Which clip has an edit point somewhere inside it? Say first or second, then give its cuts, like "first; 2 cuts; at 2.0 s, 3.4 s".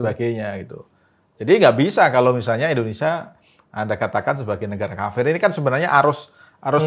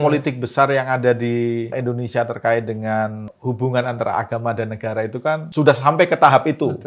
second; 3 cuts; at 1.8 s, 3.3 s, 5.5 s